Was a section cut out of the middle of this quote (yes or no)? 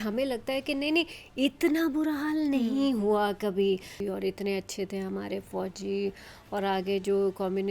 yes